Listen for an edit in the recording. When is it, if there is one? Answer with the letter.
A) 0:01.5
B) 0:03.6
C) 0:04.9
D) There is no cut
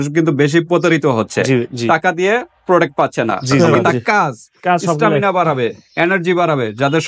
B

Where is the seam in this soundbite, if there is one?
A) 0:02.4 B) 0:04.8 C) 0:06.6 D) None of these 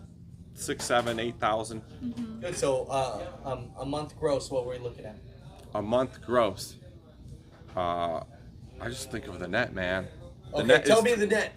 A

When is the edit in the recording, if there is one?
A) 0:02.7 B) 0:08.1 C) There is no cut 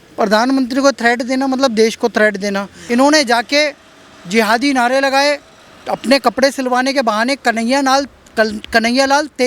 A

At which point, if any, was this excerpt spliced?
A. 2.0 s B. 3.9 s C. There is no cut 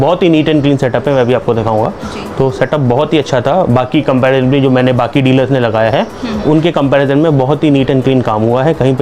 C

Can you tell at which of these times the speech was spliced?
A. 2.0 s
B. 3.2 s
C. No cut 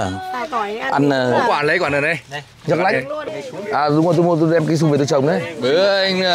B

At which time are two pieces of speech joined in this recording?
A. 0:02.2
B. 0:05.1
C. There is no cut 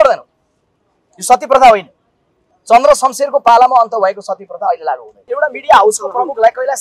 B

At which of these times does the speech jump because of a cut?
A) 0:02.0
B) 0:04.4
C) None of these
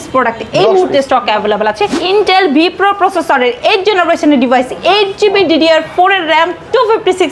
A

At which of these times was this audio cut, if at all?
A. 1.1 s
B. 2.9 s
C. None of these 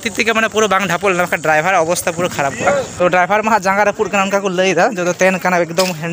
B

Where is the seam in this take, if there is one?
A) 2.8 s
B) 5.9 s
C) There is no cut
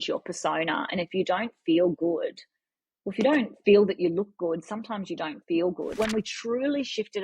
B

